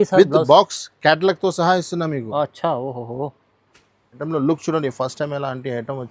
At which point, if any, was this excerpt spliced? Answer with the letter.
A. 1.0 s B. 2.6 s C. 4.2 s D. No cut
C